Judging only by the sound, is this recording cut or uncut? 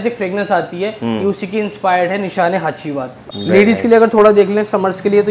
cut